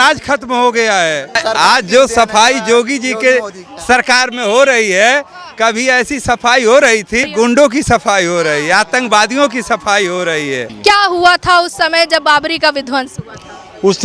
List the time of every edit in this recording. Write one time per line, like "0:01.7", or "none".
0:01.4
0:07.3
0:10.7

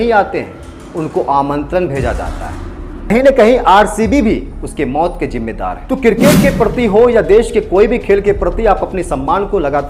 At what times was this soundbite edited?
0:05.8

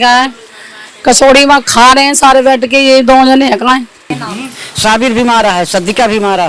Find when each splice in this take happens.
0:04.1

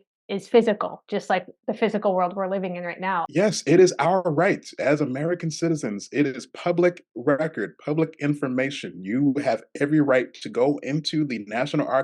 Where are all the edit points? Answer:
0:03.3

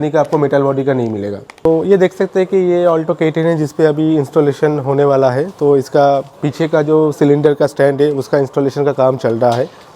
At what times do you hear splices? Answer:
0:01.7

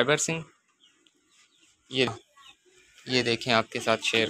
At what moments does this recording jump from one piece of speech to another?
0:02.1

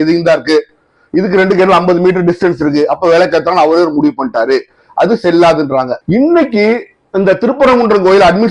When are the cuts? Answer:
0:06.0

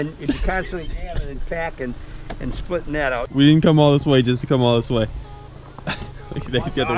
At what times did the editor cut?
0:03.2

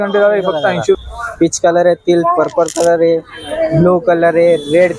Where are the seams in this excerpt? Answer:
0:00.9

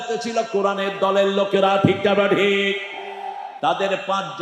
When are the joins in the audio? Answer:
none

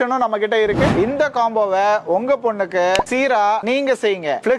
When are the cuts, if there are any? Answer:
0:00.9
0:03.6

